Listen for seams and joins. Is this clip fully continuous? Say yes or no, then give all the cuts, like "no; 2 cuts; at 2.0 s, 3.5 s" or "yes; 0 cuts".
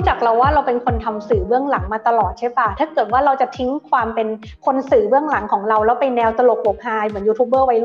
yes; 0 cuts